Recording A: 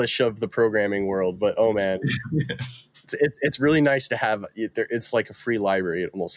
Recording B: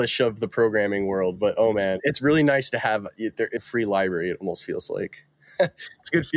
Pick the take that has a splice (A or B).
B